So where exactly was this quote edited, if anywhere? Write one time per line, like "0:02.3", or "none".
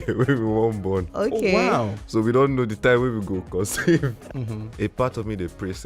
0:04.2